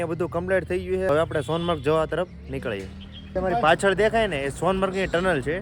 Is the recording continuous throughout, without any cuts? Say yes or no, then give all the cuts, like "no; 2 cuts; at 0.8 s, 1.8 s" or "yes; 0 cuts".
no; 2 cuts; at 1.1 s, 3.3 s